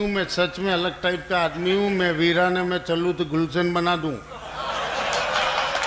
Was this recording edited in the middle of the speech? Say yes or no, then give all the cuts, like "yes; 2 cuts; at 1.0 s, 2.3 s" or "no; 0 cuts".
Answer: no; 0 cuts